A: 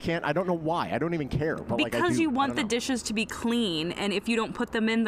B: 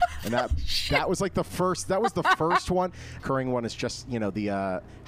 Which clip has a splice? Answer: B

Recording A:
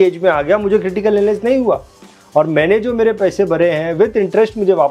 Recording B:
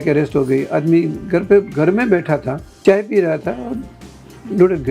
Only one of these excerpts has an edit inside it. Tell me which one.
B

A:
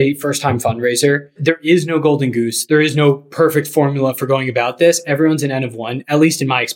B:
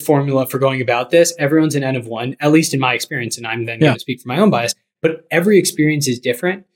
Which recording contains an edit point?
A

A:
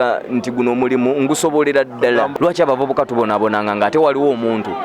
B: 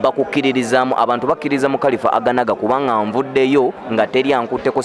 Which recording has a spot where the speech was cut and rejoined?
A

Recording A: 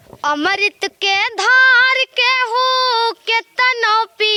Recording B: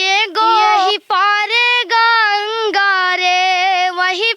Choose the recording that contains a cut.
B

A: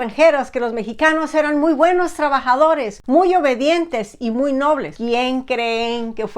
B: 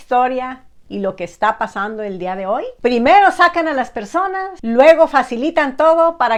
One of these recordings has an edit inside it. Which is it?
A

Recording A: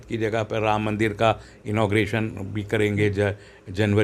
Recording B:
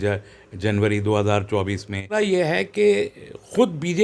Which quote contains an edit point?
B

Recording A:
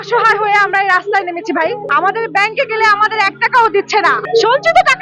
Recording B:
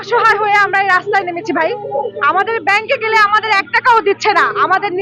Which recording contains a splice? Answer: A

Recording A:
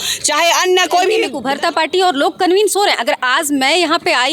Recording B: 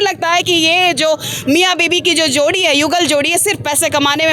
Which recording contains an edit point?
A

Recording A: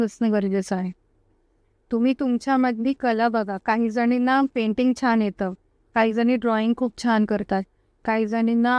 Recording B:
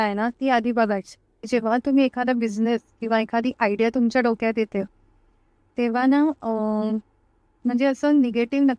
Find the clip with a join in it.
B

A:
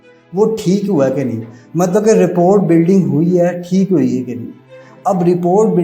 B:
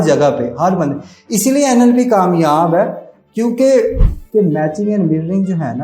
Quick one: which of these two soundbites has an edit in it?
B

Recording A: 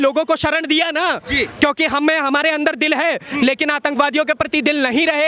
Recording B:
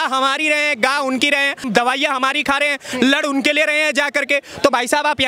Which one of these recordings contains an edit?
B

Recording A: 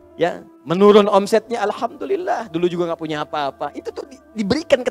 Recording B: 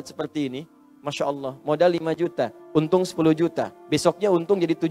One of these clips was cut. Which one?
B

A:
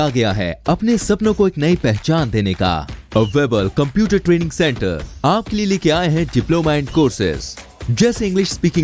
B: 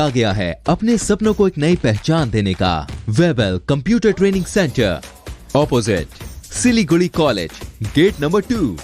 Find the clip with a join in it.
B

